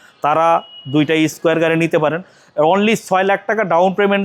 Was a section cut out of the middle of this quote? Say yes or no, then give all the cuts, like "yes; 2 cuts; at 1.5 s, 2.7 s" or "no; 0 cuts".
no; 0 cuts